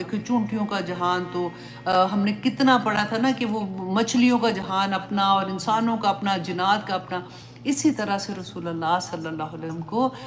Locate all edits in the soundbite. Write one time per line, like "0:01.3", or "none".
none